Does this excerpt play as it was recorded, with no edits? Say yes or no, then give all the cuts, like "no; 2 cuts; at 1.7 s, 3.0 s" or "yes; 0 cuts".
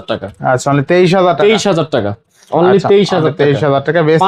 yes; 0 cuts